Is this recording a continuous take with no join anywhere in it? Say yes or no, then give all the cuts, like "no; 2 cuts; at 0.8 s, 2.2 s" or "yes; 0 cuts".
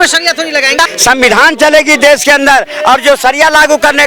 no; 1 cut; at 0.9 s